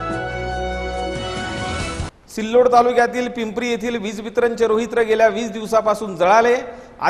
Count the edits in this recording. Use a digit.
1